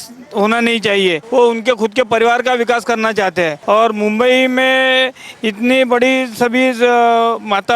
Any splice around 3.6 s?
yes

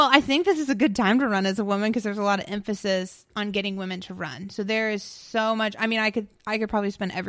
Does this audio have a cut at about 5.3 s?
no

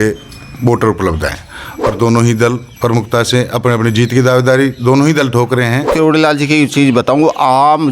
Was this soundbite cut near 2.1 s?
no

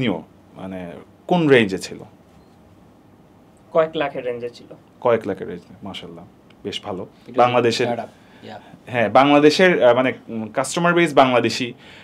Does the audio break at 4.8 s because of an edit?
no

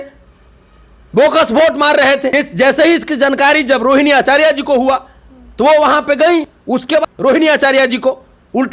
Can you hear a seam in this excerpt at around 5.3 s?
no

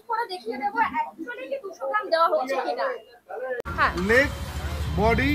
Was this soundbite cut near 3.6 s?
yes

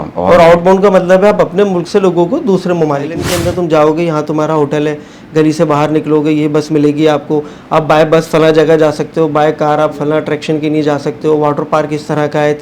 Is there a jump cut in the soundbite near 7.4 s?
no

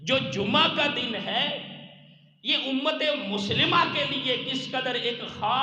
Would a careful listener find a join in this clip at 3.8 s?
no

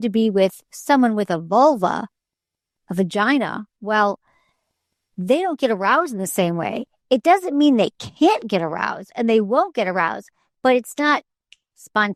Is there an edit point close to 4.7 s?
no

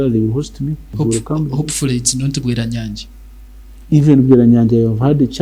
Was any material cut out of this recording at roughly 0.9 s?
yes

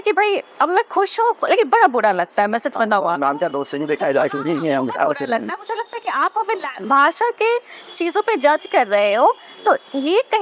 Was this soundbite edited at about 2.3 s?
no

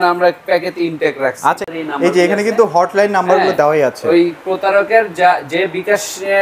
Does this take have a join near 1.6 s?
yes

